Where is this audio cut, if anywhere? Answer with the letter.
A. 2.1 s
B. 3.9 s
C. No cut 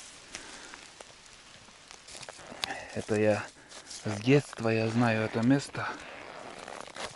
A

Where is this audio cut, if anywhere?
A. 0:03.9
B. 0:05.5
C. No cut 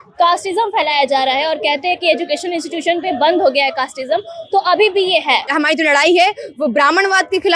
B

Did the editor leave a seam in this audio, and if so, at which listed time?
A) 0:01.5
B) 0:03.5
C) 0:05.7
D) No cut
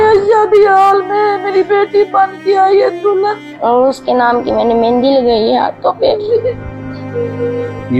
B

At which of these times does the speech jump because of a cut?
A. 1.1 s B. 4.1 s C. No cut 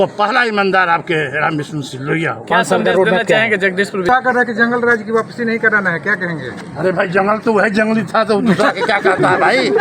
B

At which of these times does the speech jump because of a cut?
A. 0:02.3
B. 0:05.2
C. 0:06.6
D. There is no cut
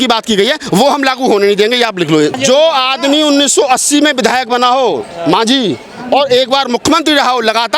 A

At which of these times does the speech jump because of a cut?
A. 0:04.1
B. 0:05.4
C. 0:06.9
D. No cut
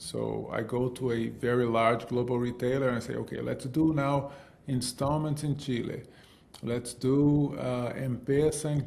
D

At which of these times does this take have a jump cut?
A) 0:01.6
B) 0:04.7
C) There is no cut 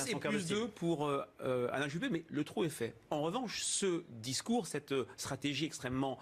A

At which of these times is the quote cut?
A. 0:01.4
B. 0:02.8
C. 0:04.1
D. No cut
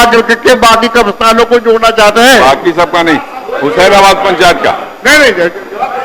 D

